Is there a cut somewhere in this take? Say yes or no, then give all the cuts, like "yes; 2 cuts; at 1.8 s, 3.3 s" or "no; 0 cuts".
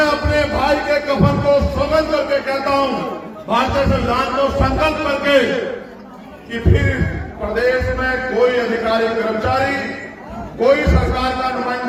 no; 0 cuts